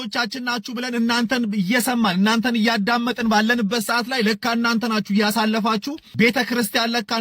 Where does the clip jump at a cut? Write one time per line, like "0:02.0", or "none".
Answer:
0:06.0